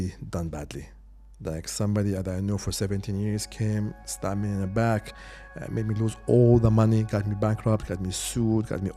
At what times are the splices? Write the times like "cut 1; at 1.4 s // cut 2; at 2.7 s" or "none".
none